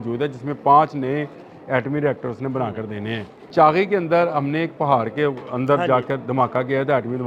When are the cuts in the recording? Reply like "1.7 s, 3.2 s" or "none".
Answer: 3.3 s